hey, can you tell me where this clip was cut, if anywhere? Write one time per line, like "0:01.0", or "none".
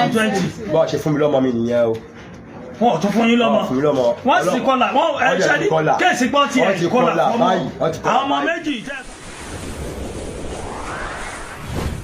0:08.8

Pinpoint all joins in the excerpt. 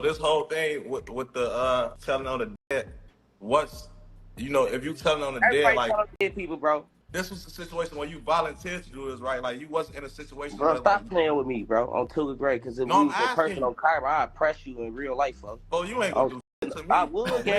0:02.0
0:07.0

